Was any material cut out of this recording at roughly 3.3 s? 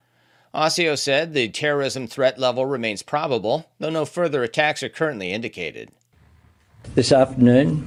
no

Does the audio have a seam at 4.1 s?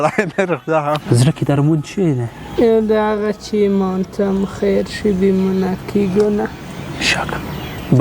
no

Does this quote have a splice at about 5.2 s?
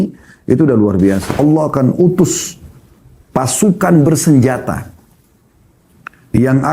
no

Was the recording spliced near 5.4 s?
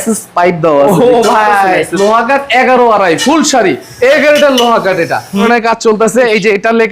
yes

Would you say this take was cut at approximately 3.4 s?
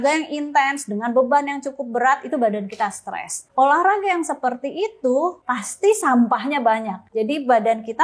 yes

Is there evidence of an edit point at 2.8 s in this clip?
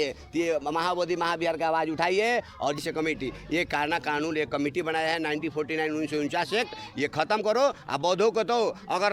yes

